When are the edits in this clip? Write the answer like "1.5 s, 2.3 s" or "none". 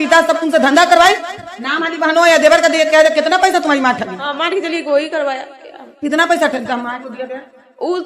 none